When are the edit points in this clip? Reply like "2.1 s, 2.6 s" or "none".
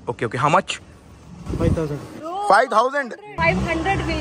none

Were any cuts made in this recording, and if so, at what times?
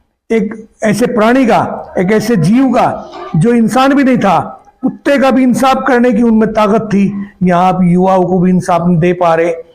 none

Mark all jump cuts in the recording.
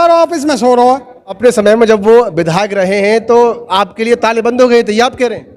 1.3 s

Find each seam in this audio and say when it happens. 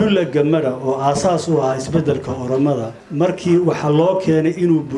3.0 s

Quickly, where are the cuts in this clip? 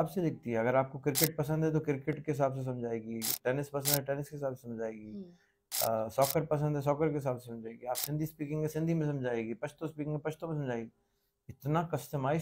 none

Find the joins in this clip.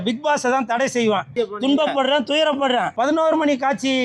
1.3 s, 2.9 s

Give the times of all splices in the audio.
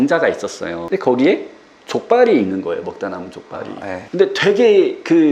none

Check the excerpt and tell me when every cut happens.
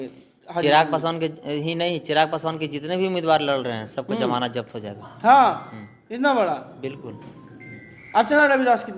none

